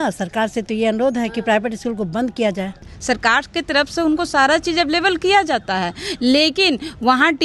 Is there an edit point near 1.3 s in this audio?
no; 1 cut; at 2.9 s

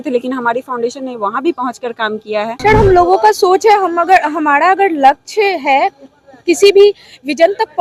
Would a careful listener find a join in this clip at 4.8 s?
no; 1 cut; at 2.5 s

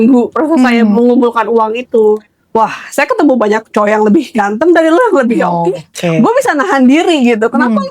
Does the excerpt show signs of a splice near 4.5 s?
no; 1 cut; at 2.2 s

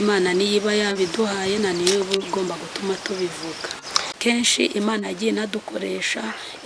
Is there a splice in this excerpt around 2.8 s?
no; 1 cut; at 4.1 s

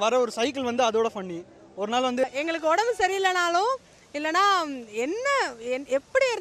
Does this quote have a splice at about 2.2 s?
yes; 1 cut; at 2.2 s

